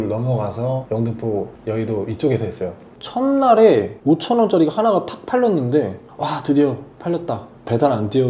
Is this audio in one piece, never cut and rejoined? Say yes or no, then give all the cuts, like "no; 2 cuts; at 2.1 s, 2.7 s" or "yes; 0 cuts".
no; 1 cut; at 2.9 s